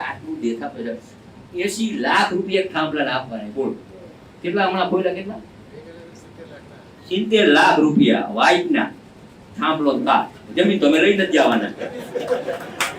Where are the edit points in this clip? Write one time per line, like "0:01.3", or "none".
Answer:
none